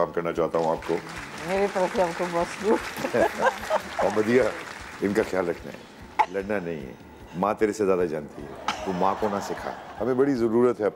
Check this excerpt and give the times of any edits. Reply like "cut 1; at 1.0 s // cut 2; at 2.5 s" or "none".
cut 1; at 9.8 s